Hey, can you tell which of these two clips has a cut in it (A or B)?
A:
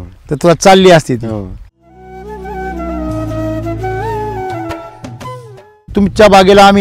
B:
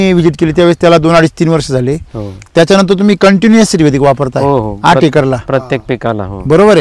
A